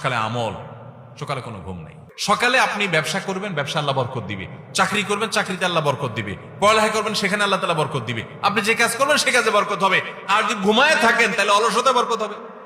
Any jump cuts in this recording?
yes; 1 cut; at 2.1 s

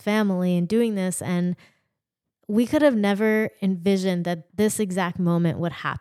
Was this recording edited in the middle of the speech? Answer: yes; 1 cut; at 4.4 s

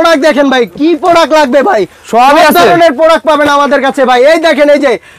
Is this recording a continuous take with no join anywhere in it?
yes; 0 cuts

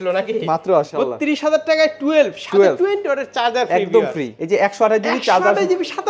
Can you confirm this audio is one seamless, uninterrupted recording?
no; 2 cuts; at 0.9 s, 4.3 s

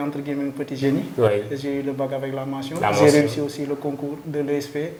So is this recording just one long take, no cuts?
yes; 0 cuts

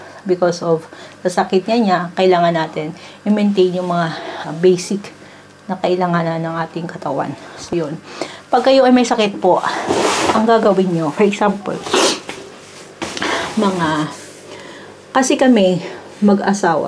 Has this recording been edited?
no; 0 cuts

